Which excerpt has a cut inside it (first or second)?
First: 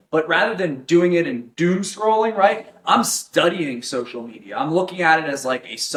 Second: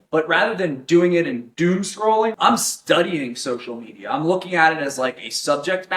second